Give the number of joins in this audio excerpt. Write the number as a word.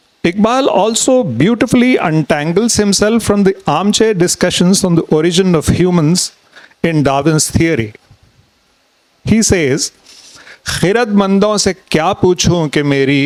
zero